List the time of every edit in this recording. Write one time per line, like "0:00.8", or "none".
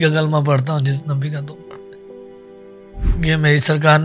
0:01.5
0:03.1